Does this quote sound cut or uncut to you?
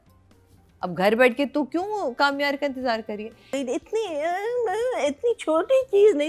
cut